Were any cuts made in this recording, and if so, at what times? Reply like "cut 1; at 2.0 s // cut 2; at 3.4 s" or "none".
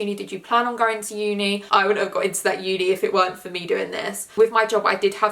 cut 1; at 1.6 s // cut 2; at 4.2 s